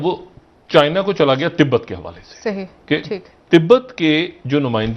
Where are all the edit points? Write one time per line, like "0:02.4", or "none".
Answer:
none